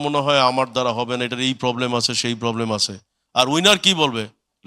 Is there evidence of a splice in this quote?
no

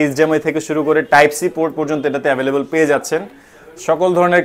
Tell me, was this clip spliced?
no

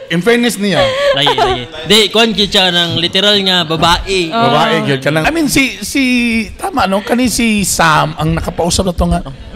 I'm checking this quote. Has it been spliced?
yes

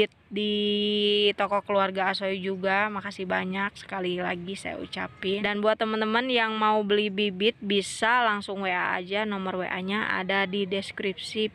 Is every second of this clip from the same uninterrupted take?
no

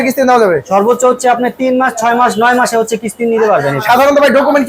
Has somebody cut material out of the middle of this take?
no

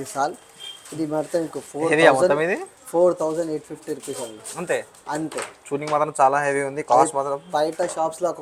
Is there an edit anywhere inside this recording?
no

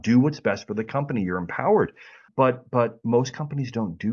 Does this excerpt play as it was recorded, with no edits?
no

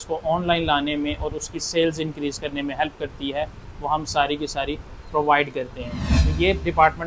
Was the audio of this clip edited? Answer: yes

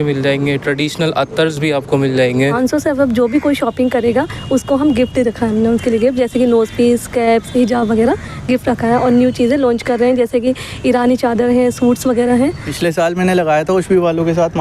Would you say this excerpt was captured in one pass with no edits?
no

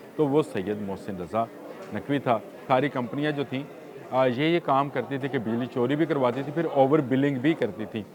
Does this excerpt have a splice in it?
yes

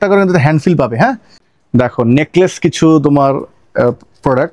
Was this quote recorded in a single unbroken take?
no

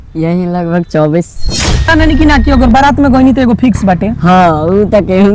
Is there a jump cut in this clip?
yes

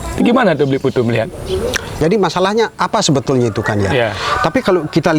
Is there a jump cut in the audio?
yes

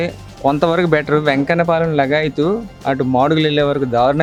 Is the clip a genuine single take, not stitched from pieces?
yes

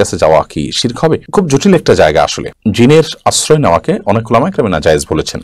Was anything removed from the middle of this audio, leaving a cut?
no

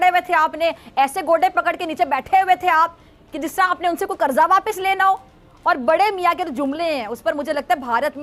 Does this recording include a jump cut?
no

